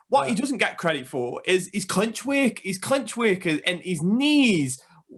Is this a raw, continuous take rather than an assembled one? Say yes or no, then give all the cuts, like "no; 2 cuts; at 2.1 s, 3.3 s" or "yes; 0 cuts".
yes; 0 cuts